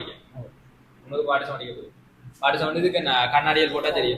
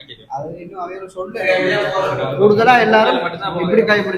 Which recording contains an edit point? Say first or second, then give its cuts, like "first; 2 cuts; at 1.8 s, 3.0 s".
second; 1 cut; at 1.3 s